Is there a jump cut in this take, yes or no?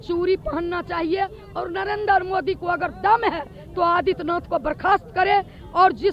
no